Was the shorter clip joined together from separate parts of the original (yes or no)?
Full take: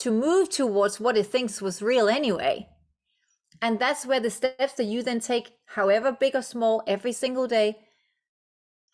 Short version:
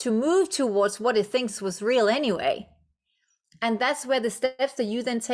no